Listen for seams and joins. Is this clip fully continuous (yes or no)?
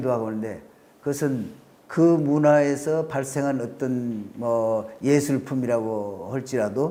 yes